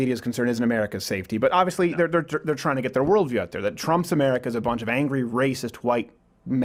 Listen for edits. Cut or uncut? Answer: uncut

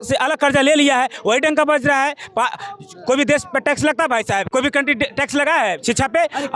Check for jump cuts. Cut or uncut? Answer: uncut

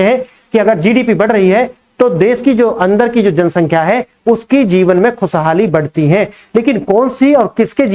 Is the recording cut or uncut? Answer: uncut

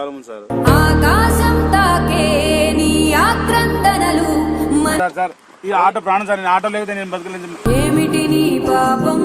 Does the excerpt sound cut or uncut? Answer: cut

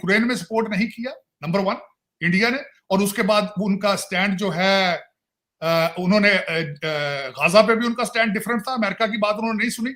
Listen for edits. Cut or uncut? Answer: uncut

